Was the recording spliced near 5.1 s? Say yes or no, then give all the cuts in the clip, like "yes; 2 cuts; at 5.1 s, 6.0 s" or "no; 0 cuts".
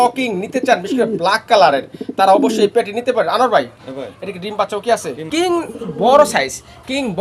yes; 1 cut; at 5.1 s